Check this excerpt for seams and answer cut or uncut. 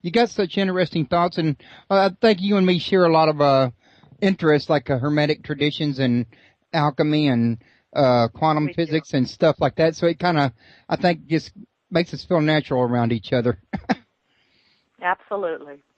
cut